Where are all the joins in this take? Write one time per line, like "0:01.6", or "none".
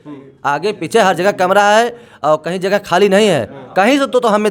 none